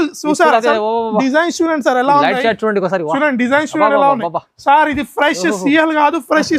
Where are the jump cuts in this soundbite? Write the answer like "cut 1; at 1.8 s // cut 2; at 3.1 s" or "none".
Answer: none